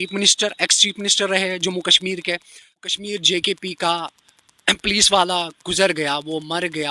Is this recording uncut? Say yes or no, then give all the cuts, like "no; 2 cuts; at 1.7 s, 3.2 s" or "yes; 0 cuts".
no; 1 cut; at 3.0 s